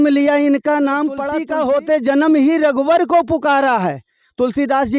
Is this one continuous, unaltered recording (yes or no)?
no